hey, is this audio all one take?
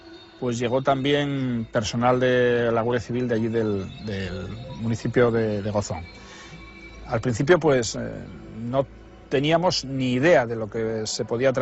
no; 1 cut; at 6.9 s

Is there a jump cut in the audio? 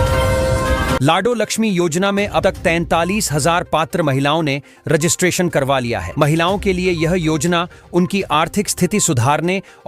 yes; 1 cut; at 1.0 s

